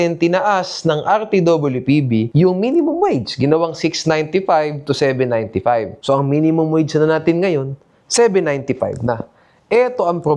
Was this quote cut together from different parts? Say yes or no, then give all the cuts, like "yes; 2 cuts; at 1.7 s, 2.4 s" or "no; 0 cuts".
no; 0 cuts